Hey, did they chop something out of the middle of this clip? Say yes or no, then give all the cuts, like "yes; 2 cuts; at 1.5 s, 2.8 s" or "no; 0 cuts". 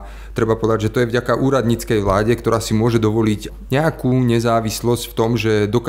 yes; 1 cut; at 3.5 s